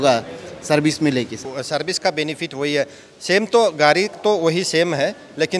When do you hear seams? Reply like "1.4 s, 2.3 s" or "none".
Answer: none